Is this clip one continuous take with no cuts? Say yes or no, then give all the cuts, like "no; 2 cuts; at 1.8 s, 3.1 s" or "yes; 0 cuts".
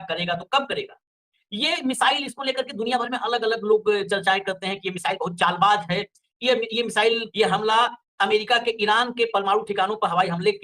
no; 1 cut; at 7.3 s